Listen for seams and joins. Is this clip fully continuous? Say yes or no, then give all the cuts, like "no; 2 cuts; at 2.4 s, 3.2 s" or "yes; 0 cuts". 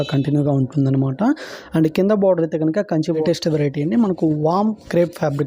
no; 1 cut; at 3.2 s